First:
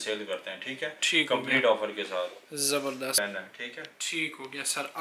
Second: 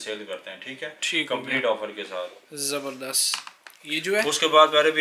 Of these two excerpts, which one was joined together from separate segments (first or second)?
first